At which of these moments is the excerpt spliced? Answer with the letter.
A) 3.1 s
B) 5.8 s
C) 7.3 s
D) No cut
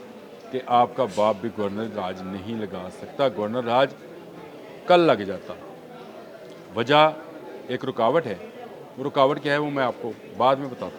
D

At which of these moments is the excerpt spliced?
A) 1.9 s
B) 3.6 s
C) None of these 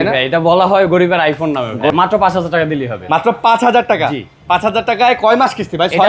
A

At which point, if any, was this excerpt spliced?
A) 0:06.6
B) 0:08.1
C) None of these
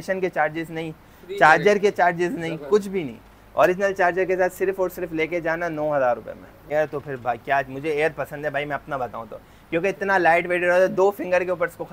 A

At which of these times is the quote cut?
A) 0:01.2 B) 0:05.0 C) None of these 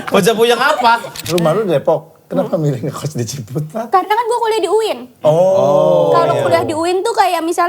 A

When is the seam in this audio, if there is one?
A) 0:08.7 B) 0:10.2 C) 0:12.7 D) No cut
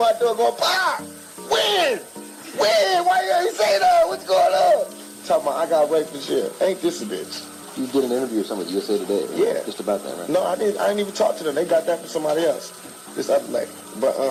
D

